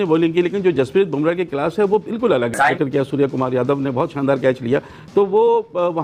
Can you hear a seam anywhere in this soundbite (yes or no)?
no